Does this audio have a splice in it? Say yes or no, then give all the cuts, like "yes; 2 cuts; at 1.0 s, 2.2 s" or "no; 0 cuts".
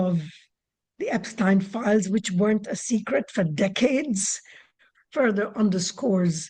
no; 0 cuts